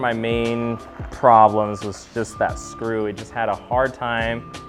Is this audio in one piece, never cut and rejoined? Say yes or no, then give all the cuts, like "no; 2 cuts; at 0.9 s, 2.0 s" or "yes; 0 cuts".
yes; 0 cuts